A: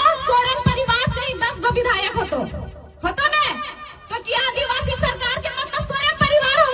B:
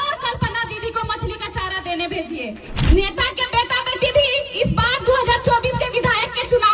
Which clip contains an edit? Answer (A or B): B